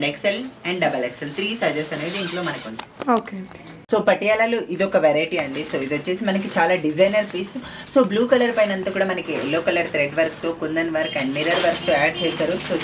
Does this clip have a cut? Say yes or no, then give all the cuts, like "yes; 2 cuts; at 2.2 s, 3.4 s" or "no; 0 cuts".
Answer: no; 0 cuts